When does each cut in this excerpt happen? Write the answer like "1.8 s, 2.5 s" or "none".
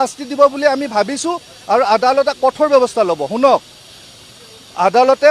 none